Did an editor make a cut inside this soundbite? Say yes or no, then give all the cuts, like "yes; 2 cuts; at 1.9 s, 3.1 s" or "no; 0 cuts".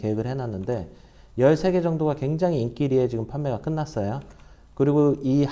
no; 0 cuts